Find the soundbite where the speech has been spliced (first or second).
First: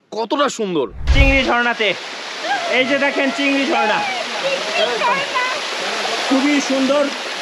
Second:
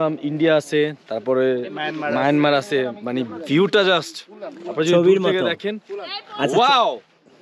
first